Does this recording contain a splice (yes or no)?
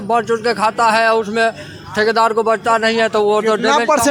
no